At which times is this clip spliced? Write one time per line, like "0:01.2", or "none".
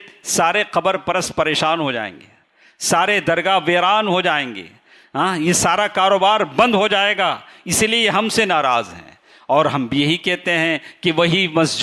none

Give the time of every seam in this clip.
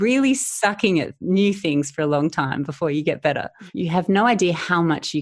0:03.6

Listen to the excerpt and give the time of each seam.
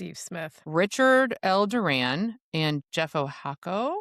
none

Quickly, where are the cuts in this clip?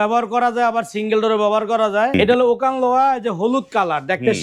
0:02.1

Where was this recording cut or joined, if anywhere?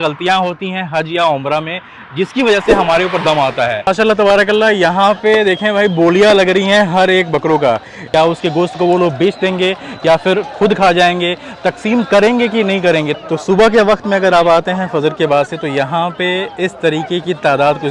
0:03.8
0:07.9
0:13.2

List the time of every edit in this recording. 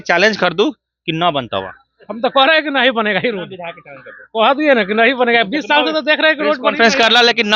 none

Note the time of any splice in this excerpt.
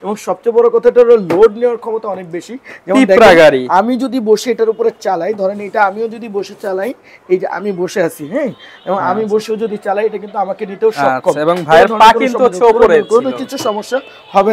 none

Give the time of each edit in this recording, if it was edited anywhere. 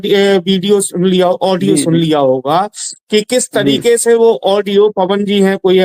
none

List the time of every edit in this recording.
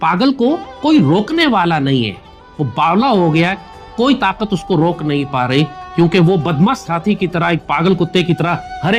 none

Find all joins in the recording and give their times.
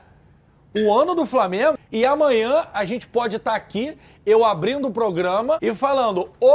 0:01.8
0:05.6

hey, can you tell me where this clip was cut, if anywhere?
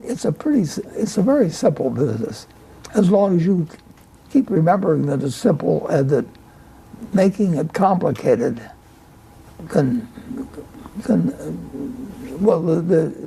none

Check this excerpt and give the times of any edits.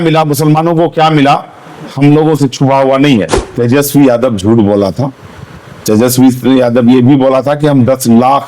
0:03.4

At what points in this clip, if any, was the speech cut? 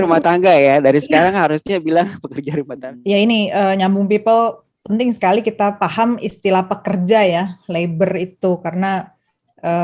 0:02.7

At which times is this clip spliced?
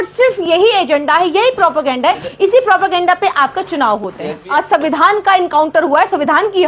0:04.4

